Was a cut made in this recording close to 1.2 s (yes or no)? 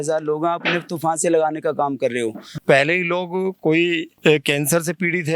no